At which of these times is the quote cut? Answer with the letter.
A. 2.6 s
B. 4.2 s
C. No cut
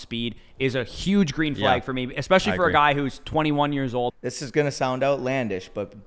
B